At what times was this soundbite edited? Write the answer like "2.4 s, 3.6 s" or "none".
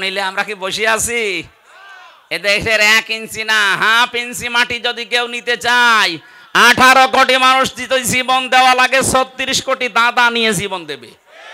none